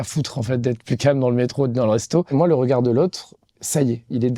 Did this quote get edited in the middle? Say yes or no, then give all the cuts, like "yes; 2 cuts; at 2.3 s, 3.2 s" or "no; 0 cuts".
yes; 1 cut; at 2.3 s